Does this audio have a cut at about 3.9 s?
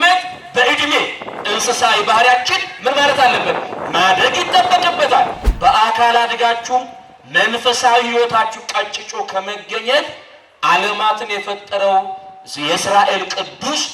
no; 1 cut; at 5.4 s

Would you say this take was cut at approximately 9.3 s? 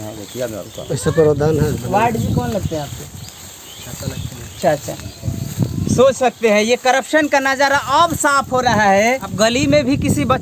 yes; 1 cut; at 9.3 s

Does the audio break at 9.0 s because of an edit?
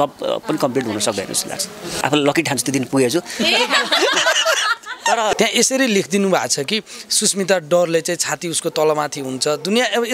no; 2 cuts; at 1.8 s, 5.3 s

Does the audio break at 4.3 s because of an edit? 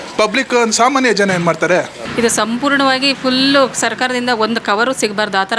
no; 1 cut; at 2.0 s

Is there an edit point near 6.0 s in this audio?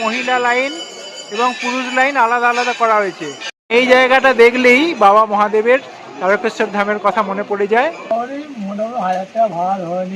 no; 2 cuts; at 3.6 s, 8.1 s

